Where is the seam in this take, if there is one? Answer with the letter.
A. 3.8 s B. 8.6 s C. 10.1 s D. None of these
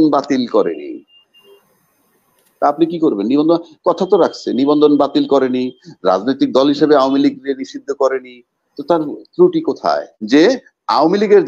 C